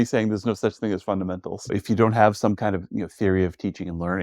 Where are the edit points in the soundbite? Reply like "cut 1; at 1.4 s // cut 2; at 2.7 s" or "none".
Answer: cut 1; at 1.6 s